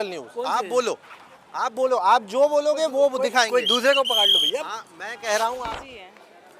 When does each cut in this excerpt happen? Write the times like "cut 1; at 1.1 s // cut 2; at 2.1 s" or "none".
cut 1; at 5.6 s